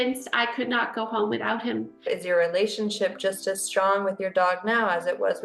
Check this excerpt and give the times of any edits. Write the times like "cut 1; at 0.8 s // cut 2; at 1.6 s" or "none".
cut 1; at 2.1 s